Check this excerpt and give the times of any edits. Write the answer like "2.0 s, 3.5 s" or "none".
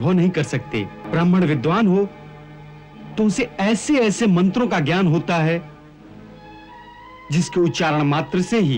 1.0 s